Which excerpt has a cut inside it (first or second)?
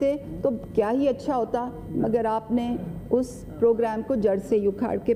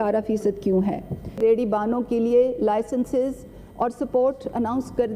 second